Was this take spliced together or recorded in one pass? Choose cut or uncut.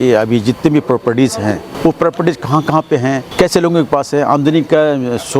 cut